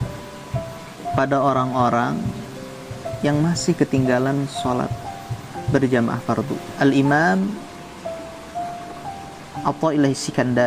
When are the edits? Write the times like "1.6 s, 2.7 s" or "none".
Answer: 6.6 s